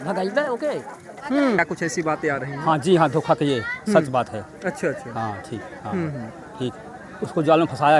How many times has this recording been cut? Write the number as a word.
one